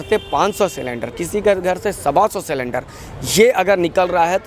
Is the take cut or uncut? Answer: uncut